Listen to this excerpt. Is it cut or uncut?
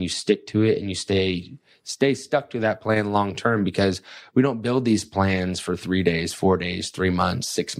uncut